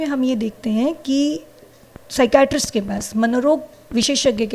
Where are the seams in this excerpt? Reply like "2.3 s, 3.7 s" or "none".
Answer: none